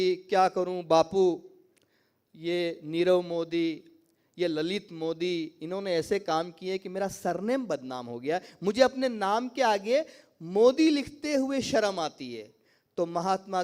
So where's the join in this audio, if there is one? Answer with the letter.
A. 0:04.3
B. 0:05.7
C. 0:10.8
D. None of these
D